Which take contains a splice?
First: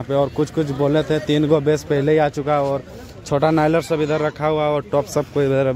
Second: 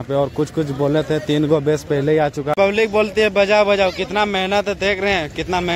second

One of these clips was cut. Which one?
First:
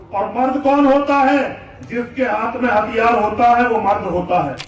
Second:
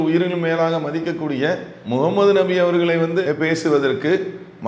second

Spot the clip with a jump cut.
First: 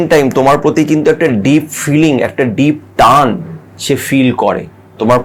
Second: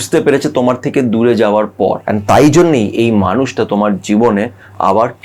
second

